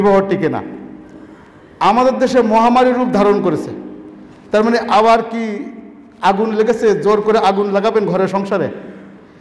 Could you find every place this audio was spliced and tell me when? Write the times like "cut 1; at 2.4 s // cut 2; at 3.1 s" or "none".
none